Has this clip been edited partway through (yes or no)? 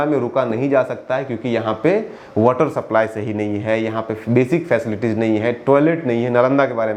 no